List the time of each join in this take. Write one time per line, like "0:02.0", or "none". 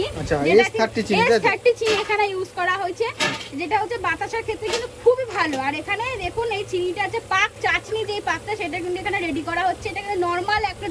none

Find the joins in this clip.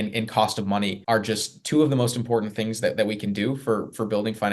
0:01.0

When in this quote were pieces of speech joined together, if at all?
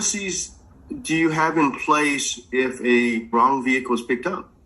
0:03.3

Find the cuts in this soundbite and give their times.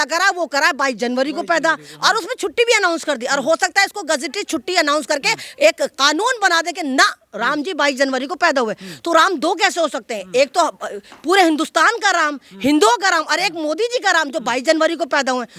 none

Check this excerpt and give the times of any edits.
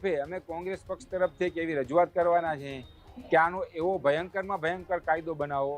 none

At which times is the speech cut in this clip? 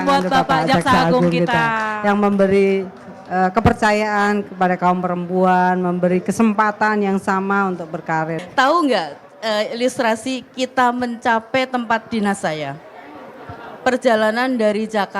0:08.4

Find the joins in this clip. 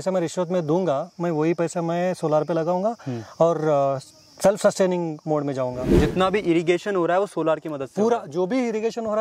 0:06.0

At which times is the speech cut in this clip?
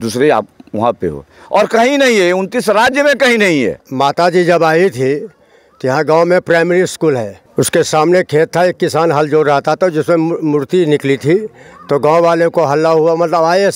0:03.7
0:07.4

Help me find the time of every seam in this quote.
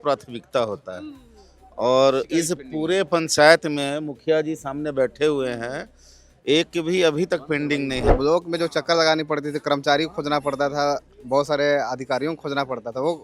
0:08.1

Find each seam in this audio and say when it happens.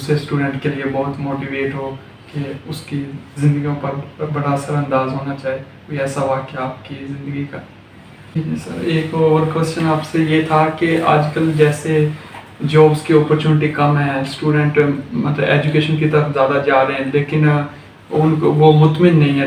0:08.4

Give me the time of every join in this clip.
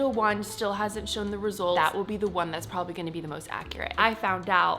0:01.8
0:03.9

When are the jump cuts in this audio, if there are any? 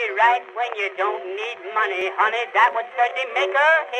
0:02.0

